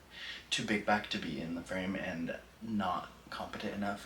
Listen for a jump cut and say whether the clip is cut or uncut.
uncut